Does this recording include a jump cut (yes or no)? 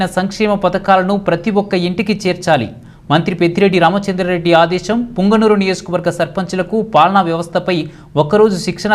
no